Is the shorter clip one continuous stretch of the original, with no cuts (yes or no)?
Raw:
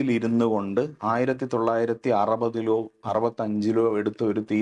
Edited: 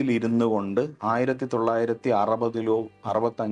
yes